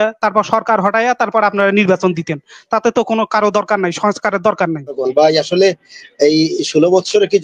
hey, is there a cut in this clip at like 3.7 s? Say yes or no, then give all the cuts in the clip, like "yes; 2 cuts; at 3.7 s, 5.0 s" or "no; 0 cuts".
no; 1 cut; at 5.0 s